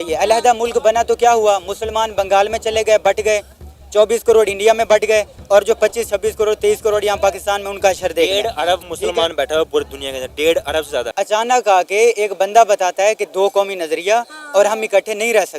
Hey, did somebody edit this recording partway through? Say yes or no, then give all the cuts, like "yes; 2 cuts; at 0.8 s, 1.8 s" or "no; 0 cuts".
yes; 1 cut; at 11.1 s